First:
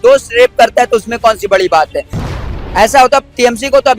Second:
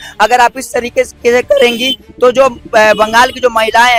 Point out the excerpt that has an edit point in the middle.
first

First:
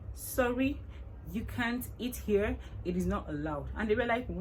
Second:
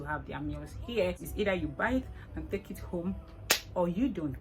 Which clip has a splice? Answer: second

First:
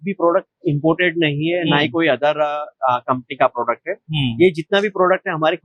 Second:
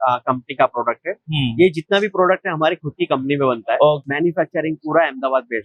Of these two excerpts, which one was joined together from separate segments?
second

